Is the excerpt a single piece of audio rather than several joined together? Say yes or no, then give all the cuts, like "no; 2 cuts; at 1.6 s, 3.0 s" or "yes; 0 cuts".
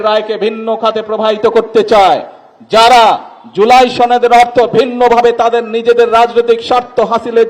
yes; 0 cuts